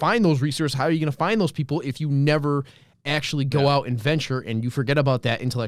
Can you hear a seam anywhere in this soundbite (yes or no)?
no